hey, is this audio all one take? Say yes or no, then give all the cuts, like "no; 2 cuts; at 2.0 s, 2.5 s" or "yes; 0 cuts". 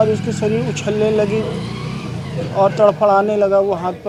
yes; 0 cuts